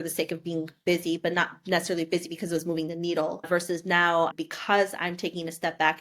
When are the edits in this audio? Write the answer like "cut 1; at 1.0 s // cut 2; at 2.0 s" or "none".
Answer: cut 1; at 3.4 s